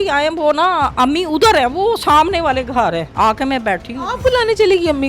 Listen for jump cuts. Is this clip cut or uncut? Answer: cut